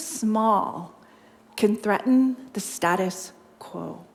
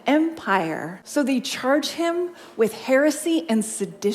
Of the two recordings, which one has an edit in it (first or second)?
second